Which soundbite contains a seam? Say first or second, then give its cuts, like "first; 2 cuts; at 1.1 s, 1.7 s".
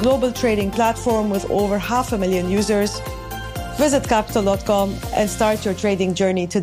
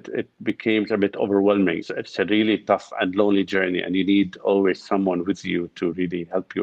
second; 1 cut; at 1.8 s